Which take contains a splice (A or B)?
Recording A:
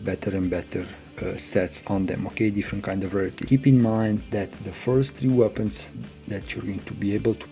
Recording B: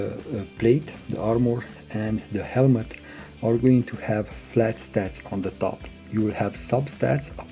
A